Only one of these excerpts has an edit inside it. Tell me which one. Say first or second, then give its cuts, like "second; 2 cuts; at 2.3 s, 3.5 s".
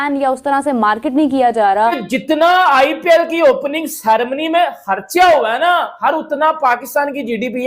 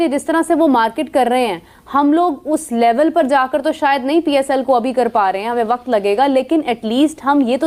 first; 1 cut; at 2.1 s